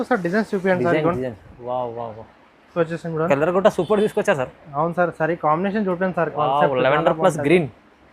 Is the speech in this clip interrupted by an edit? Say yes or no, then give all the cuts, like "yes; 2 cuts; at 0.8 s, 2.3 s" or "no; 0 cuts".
yes; 1 cut; at 2.7 s